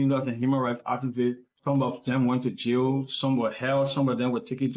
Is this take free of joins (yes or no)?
yes